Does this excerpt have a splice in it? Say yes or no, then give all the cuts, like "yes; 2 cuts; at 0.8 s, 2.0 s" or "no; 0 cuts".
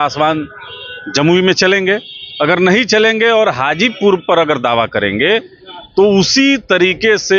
no; 0 cuts